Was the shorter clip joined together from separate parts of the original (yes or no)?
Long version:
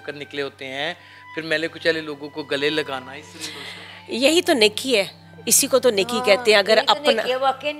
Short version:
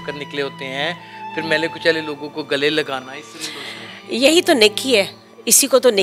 no